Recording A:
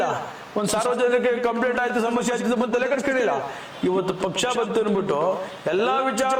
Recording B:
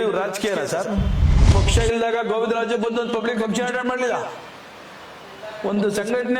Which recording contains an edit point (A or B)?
B